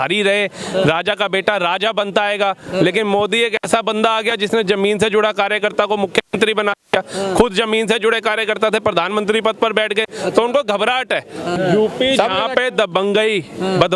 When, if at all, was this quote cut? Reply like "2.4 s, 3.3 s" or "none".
11.6 s